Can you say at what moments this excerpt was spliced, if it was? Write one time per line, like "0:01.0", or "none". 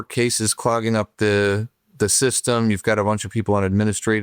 none